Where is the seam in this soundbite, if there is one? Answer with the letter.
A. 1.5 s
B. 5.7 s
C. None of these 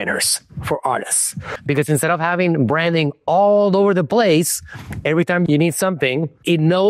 A